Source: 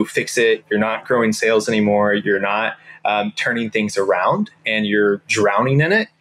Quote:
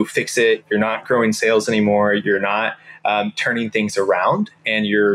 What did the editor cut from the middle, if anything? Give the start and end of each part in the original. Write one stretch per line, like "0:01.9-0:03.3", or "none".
none